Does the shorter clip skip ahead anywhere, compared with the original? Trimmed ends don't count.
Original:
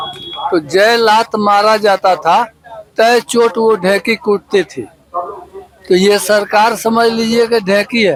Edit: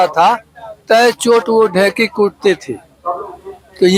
no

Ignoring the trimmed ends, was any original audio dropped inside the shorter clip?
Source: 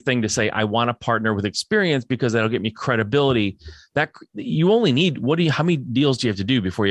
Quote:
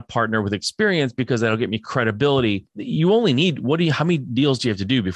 yes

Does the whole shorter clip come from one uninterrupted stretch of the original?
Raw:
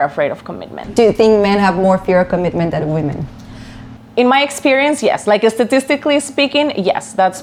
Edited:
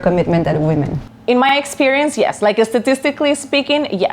no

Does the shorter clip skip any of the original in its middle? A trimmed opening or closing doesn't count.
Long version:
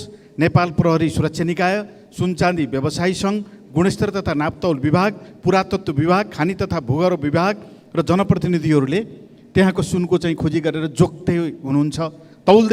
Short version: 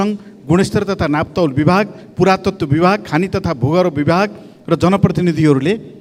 no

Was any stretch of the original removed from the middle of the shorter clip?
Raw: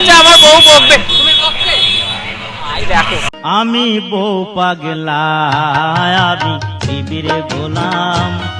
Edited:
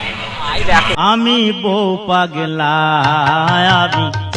yes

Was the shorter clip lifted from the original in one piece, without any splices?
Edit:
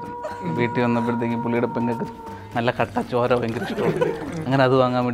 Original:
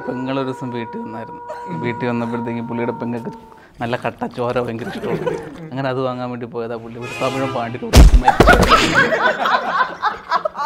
yes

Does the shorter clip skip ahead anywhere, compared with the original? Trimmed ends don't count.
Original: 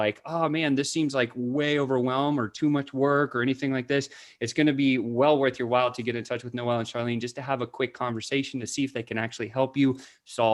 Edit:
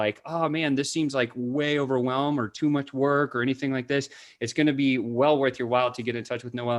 no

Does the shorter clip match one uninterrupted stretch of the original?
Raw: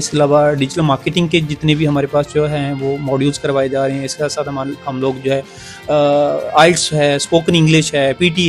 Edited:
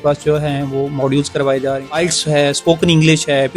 no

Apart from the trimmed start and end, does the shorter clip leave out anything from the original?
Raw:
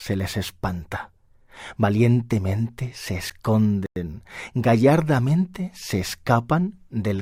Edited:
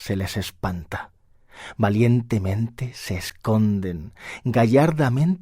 yes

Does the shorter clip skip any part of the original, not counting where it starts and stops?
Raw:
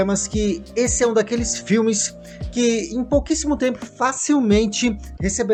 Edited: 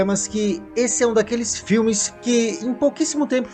yes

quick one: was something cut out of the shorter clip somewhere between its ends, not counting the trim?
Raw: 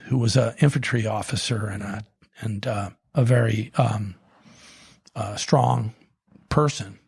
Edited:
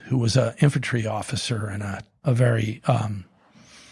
yes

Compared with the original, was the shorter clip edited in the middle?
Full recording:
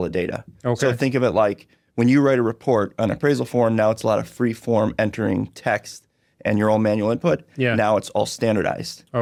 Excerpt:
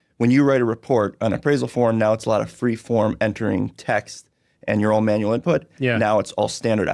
no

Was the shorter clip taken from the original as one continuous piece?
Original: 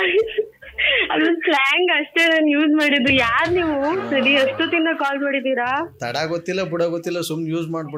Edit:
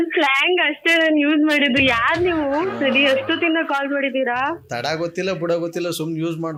yes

